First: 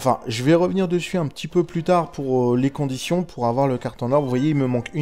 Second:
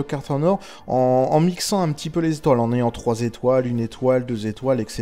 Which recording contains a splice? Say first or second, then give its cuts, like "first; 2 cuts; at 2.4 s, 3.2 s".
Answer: second; 1 cut; at 2.9 s